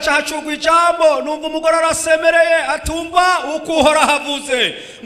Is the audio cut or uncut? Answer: uncut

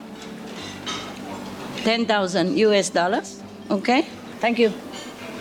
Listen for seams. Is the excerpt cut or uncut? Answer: cut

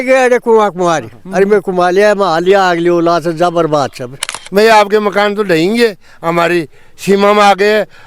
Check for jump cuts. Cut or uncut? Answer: cut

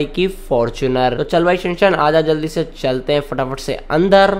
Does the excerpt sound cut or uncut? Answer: cut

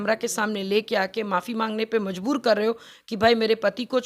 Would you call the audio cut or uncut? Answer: uncut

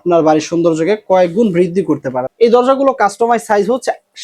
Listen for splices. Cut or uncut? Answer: cut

